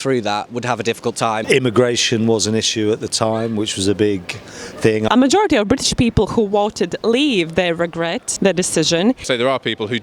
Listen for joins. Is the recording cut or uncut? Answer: cut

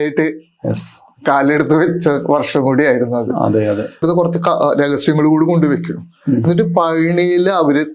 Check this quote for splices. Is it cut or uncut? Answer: cut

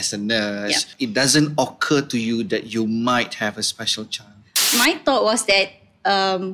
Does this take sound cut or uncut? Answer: cut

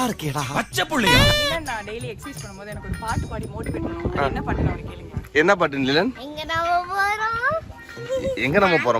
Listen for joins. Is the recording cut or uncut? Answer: cut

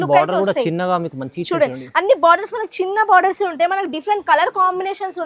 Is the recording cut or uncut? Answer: uncut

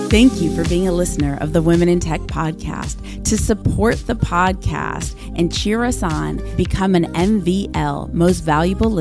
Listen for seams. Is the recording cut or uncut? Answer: uncut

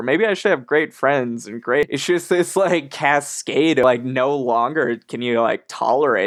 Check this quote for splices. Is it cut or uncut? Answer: cut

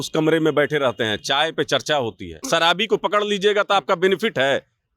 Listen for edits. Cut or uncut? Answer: cut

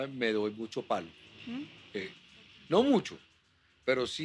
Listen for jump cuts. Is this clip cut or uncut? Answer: uncut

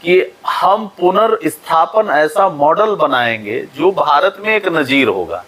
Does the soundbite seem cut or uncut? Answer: uncut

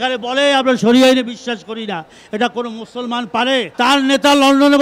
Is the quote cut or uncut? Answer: cut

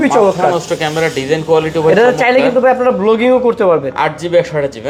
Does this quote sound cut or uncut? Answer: uncut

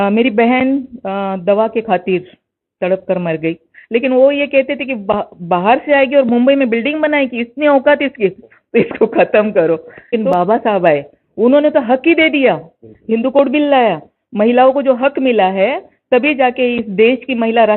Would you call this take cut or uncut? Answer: cut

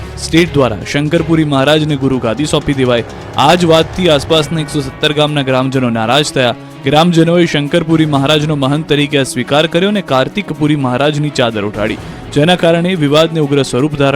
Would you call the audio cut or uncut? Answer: cut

